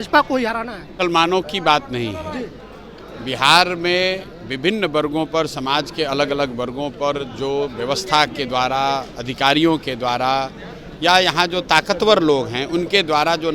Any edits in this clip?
yes; 1 cut; at 0.9 s

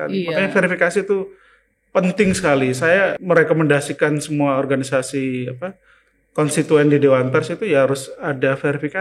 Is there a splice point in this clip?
yes; 1 cut; at 3.2 s

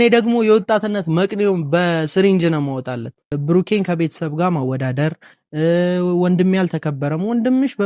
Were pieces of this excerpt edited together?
yes; 1 cut; at 3.3 s

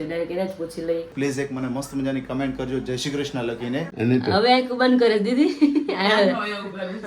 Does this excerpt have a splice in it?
yes; 2 cuts; at 1.1 s, 3.9 s

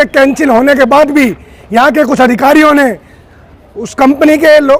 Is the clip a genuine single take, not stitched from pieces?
yes; 0 cuts

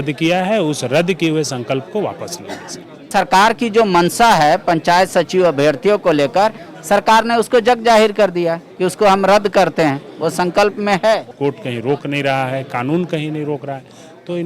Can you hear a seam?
yes; 2 cuts; at 3.1 s, 11.3 s

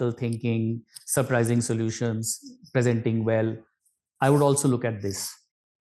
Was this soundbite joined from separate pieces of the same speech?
no; 0 cuts

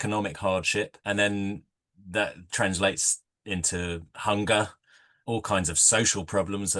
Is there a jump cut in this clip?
yes; 2 cuts; at 1.0 s, 5.1 s

